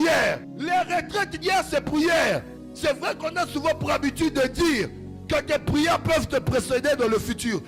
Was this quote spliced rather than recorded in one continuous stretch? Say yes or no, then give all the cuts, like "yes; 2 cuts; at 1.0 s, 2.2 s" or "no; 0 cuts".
no; 0 cuts